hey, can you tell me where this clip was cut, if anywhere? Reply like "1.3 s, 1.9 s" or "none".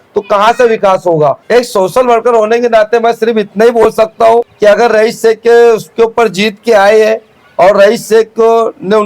1.4 s, 4.5 s

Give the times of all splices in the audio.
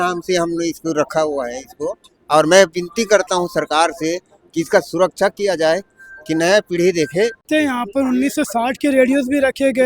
7.4 s

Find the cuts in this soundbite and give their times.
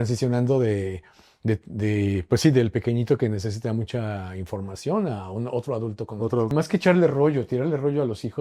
6.5 s

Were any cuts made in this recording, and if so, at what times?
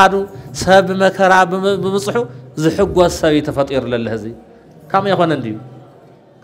none

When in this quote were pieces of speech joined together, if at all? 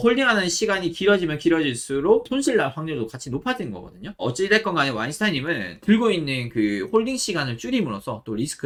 none

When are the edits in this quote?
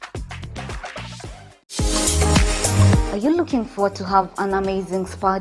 1.8 s

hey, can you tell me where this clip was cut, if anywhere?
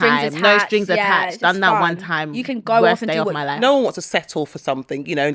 3.6 s

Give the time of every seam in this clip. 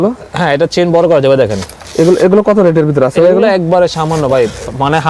none

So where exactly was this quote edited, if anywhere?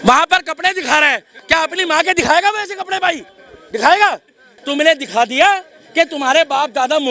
4.6 s

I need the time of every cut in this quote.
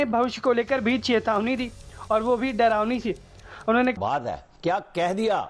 4.0 s

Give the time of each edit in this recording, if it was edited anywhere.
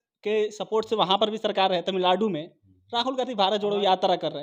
none

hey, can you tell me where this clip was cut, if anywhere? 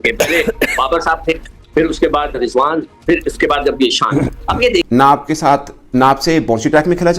4.9 s

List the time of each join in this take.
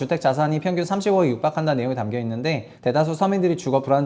2.7 s

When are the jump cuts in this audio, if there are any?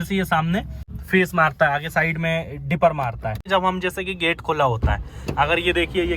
0.9 s, 3.4 s

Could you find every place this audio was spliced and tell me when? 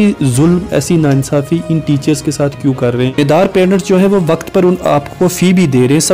3.2 s

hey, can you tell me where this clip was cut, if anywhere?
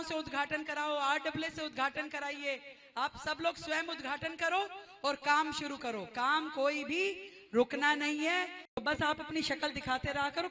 8.8 s

